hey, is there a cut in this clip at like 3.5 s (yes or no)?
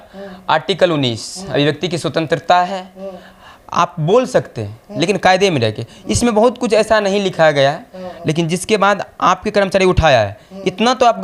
no